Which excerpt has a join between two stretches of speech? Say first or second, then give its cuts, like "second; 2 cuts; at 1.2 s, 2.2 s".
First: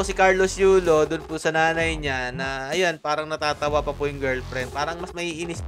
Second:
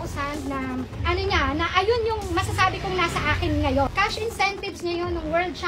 second; 1 cut; at 3.9 s